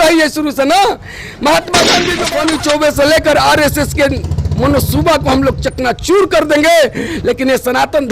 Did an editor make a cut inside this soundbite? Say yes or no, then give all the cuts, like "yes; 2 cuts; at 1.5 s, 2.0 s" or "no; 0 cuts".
yes; 1 cut; at 2.2 s